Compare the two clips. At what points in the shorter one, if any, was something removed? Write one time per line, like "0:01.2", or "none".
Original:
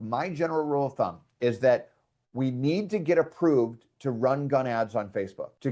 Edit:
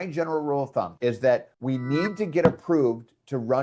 0:00.9
0:01.5